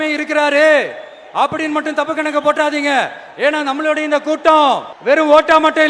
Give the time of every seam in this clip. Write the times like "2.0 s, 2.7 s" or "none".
4.9 s